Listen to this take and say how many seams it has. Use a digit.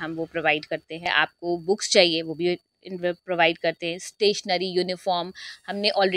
1